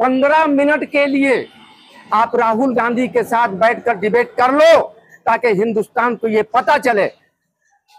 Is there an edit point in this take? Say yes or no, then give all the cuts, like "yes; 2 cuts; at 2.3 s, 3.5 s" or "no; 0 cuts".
no; 0 cuts